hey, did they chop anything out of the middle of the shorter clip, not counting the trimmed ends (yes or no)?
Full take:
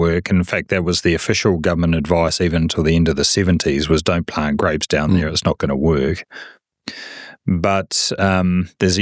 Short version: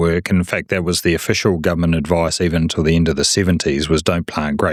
no